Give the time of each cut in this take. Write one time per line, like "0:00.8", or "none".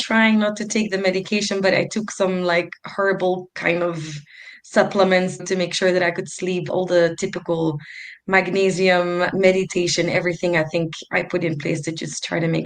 0:05.4
0:06.7
0:09.3